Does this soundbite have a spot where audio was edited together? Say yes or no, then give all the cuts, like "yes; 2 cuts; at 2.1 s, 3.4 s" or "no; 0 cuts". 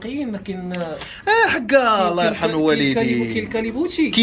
no; 0 cuts